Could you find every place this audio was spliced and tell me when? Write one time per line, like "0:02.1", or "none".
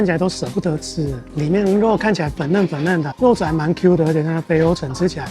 0:01.2
0:03.1